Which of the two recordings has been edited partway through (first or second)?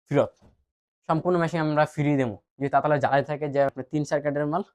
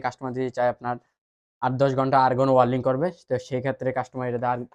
first